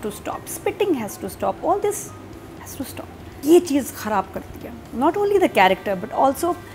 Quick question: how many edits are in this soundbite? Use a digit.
1